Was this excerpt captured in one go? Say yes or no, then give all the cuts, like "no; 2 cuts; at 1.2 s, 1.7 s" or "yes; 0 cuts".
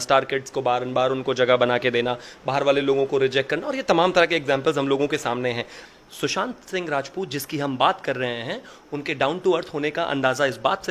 no; 1 cut; at 5.7 s